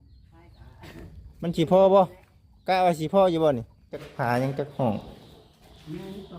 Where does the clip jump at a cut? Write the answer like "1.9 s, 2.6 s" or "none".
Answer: 4.1 s

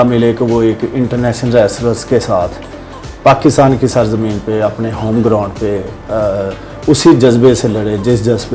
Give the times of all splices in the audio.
none

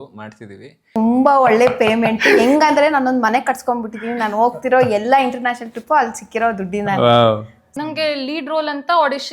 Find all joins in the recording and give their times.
0.8 s, 7.6 s

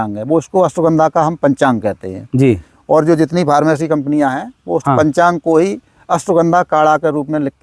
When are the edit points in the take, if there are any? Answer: none

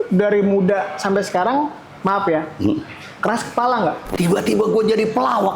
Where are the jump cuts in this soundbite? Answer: 4.0 s

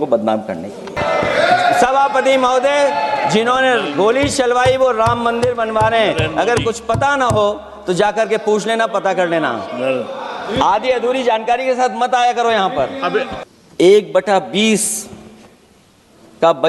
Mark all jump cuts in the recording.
1.0 s, 13.4 s

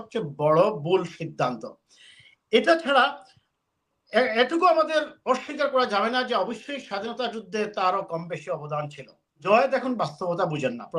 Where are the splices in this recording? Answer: 9.4 s

